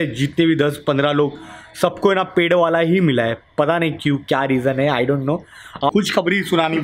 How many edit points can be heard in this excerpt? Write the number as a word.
one